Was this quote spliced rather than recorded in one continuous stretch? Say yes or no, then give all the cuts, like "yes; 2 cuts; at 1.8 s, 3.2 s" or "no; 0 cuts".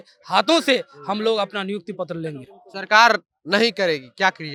no; 0 cuts